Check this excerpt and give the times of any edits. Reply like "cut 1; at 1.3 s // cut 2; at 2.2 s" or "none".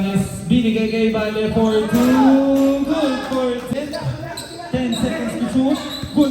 cut 1; at 3.7 s